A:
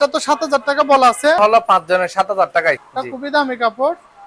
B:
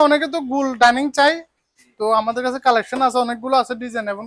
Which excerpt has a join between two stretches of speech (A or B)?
A